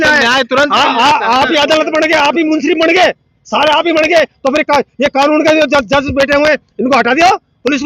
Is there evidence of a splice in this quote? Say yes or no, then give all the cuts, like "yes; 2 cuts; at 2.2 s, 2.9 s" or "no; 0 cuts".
no; 0 cuts